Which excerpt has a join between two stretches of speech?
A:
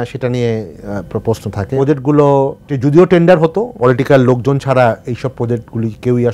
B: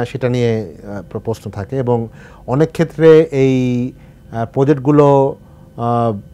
A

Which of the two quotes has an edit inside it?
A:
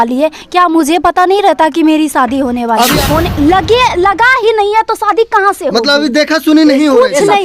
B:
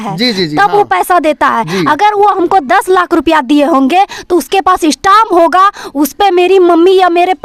A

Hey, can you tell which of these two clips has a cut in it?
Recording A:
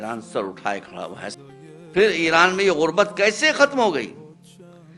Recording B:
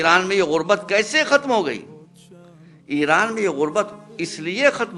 A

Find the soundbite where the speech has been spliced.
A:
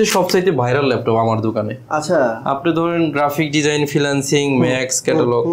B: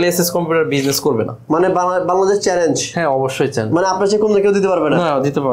B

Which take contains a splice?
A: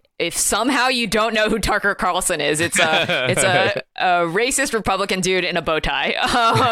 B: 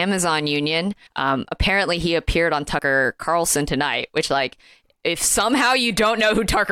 B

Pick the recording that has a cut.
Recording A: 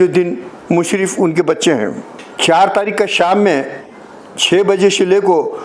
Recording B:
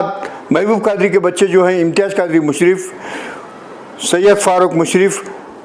A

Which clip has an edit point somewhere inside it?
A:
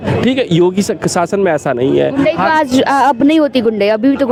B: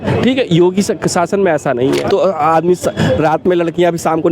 B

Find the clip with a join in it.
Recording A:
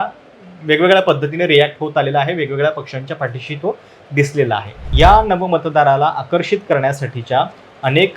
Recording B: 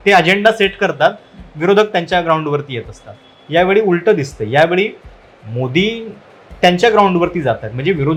A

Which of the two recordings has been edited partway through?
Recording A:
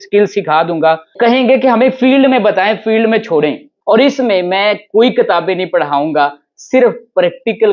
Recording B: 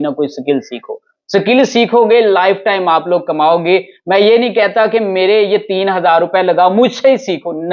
A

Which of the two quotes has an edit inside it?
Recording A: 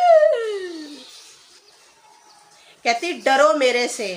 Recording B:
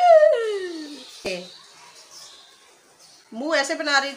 B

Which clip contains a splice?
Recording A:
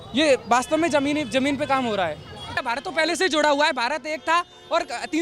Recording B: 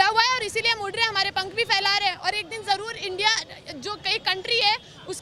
A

